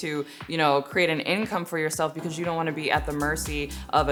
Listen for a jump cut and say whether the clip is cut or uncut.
uncut